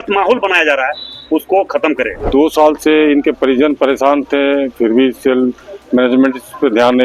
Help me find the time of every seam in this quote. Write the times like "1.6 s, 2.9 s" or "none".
2.3 s